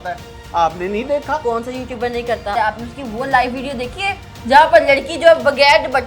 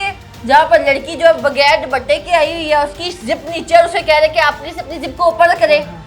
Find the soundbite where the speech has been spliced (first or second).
first